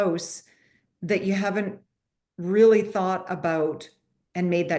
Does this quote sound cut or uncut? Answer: uncut